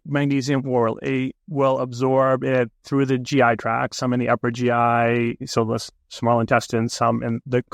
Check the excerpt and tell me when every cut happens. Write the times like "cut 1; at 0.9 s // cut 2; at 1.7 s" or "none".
none